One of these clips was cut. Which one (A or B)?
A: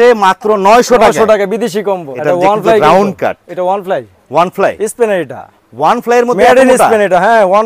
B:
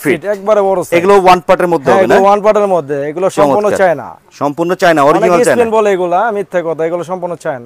A